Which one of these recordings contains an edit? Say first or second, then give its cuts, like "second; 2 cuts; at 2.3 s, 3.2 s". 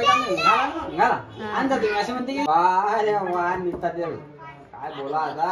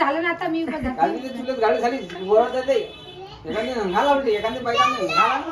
first; 1 cut; at 2.4 s